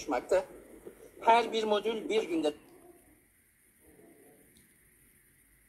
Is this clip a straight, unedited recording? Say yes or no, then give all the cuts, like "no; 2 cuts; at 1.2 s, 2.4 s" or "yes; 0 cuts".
yes; 0 cuts